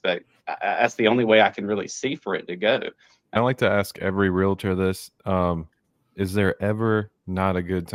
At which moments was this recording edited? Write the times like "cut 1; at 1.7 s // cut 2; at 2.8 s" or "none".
cut 1; at 3.3 s